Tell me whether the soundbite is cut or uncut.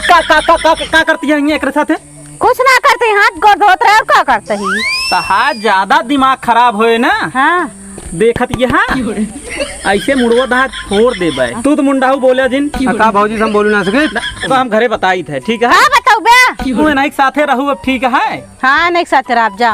cut